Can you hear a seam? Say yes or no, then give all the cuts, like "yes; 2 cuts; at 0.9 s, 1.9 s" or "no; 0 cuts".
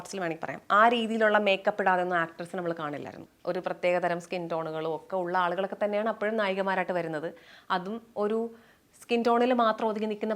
yes; 1 cut; at 3.3 s